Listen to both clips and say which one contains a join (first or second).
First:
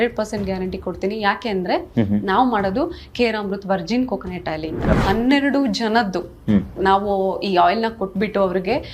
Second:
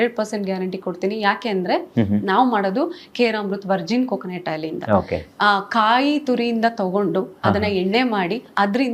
first